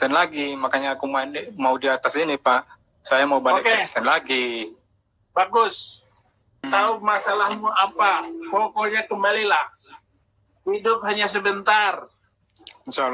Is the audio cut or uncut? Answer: cut